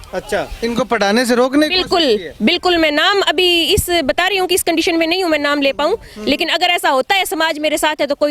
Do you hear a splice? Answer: no; 0 cuts

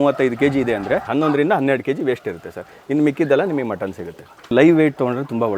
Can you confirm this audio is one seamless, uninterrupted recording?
no; 2 cuts; at 1.1 s, 4.5 s

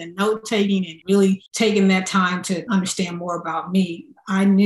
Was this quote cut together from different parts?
yes; 3 cuts; at 0.9 s, 1.5 s, 2.7 s

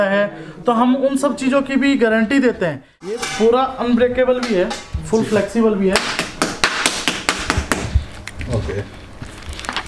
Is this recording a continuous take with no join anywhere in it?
no; 1 cut; at 3.1 s

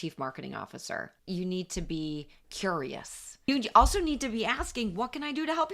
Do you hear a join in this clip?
yes; 2 cuts; at 1.1 s, 3.5 s

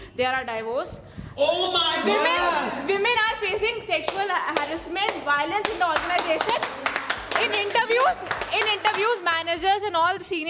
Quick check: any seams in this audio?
no; 0 cuts

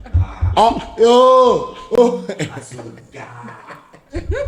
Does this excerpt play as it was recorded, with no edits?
yes; 0 cuts

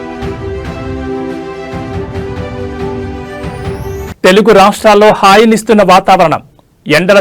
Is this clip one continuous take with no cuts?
no; 1 cut; at 3.3 s

